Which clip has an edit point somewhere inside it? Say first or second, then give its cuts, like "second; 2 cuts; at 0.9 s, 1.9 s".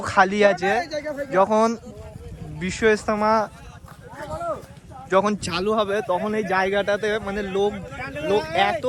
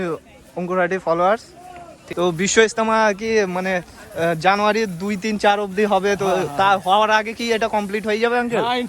second; 1 cut; at 2.0 s